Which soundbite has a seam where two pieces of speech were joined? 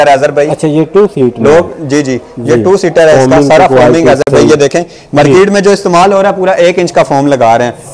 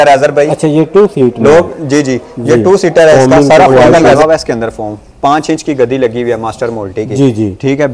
second; 1 cut; at 4.2 s

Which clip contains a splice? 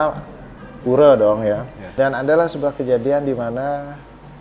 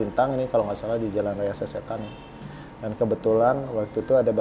first; 1 cut; at 1.8 s

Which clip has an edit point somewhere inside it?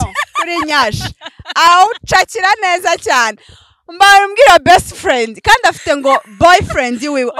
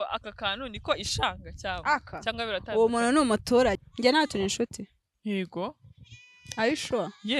second; 1 cut; at 3.8 s

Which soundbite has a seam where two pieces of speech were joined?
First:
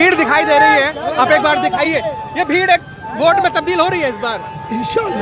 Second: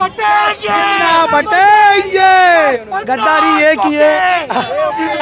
second; 1 cut; at 2.8 s

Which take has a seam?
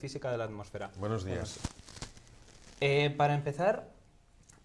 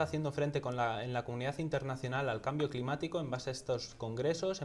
first; 1 cut; at 2.3 s

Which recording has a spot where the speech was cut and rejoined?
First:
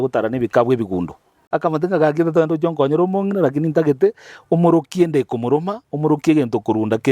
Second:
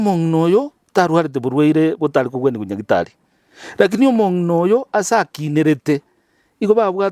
first; 1 cut; at 1.4 s

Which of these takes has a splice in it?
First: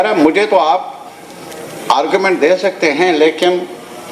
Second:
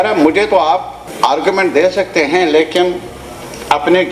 second; 1 cut; at 1.0 s

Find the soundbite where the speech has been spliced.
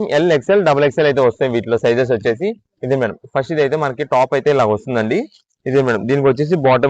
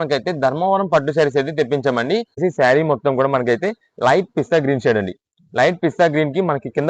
second; 1 cut; at 2.4 s

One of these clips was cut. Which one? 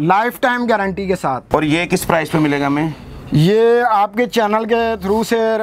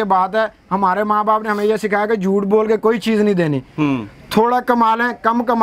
first; 1 cut; at 1.4 s

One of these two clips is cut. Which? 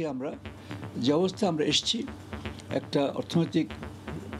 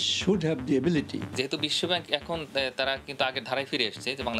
second; 1 cut; at 1.3 s

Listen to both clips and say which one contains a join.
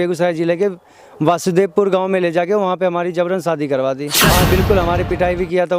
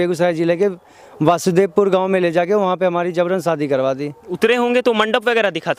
first; 1 cut; at 4.1 s

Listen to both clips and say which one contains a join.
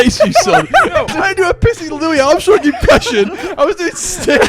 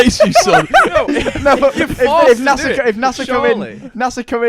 first; 1 cut; at 1.1 s

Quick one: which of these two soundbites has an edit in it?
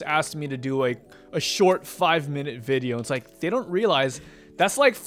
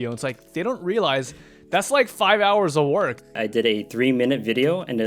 second; 1 cut; at 3.4 s

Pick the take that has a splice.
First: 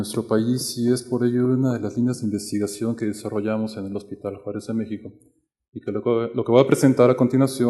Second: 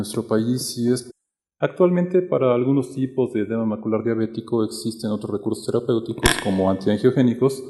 first; 1 cut; at 1.0 s

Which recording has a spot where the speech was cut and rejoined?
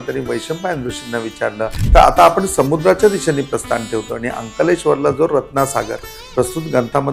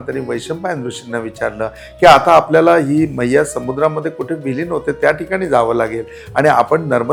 first; 1 cut; at 1.8 s

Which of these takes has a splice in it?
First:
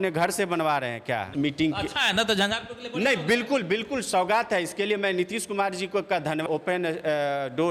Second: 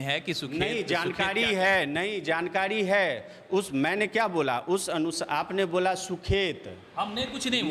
first; 2 cuts; at 1.3 s, 6.4 s

